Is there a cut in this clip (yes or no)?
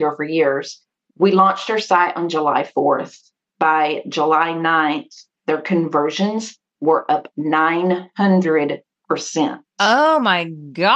no